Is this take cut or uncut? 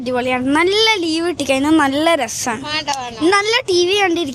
uncut